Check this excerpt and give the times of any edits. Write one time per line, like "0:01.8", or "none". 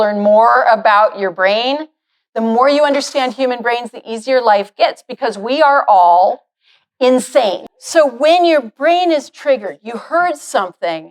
0:07.7